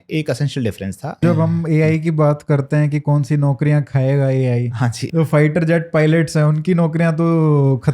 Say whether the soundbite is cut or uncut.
cut